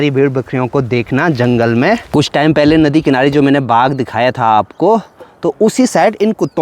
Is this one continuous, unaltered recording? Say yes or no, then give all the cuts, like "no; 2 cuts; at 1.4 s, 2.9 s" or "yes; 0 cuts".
no; 1 cut; at 2.0 s